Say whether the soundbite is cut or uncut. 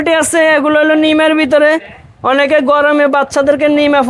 uncut